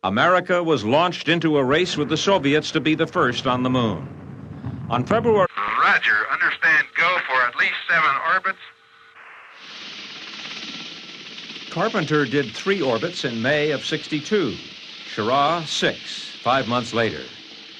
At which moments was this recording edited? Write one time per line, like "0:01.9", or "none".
none